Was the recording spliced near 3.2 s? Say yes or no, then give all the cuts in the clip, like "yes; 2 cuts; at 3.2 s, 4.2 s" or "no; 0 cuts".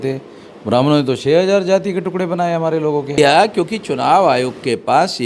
yes; 1 cut; at 3.2 s